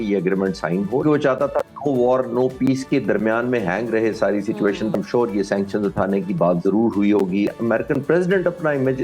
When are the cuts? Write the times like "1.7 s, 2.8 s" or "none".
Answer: 1.0 s, 4.9 s, 7.5 s